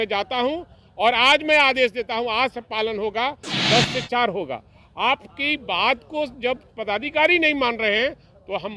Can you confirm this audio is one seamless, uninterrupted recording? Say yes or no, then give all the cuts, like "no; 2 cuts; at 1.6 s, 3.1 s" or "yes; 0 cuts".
no; 1 cut; at 3.6 s